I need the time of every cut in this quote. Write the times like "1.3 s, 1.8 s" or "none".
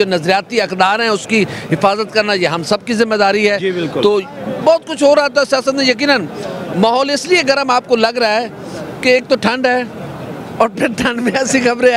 none

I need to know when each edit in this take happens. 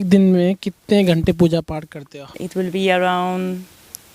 2.4 s

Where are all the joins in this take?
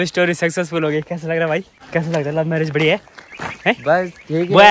1.8 s

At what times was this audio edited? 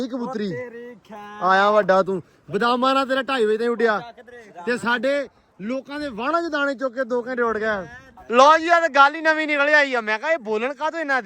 8.1 s

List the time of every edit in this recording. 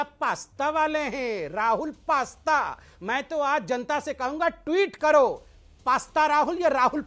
1.4 s, 2.8 s

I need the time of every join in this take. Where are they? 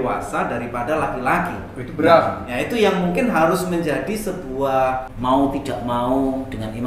5.1 s

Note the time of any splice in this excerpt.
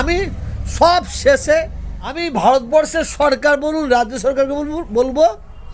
2.2 s

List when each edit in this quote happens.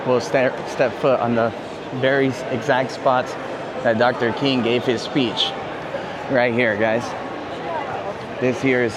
none

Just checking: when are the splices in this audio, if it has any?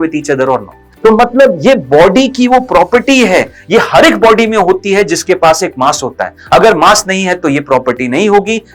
0.9 s

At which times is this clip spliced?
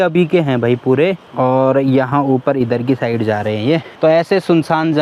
1.2 s

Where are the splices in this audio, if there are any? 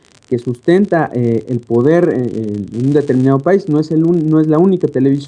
2.3 s

